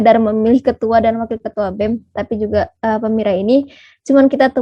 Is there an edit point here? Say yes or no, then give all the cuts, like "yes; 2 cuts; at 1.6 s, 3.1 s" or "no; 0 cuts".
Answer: no; 0 cuts